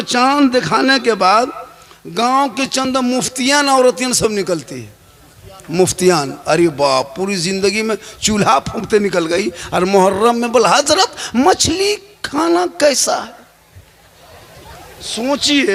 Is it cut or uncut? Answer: uncut